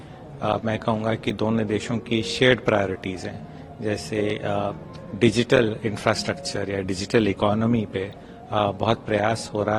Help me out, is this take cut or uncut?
uncut